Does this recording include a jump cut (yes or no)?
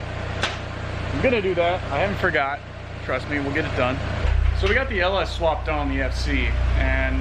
yes